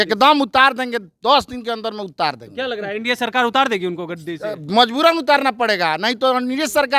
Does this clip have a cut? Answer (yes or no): no